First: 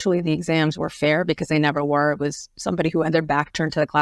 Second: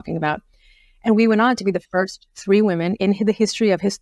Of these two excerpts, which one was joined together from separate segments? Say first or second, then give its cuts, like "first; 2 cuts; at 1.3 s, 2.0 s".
second; 1 cut; at 3.0 s